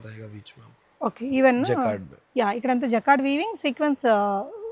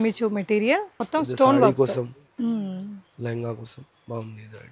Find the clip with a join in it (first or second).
second